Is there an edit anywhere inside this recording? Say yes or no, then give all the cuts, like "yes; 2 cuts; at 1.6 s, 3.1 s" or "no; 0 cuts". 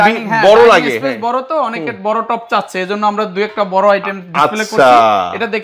no; 0 cuts